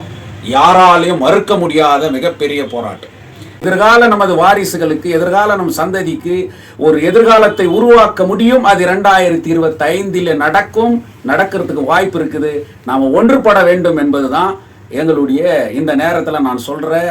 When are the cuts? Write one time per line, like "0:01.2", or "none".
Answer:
0:03.4